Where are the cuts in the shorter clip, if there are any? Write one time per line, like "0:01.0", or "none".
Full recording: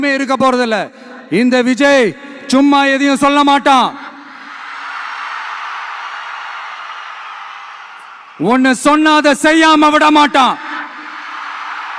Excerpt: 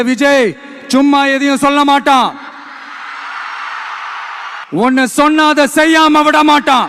0:04.6